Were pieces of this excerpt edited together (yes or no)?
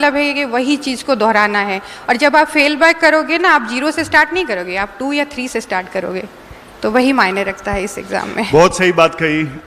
no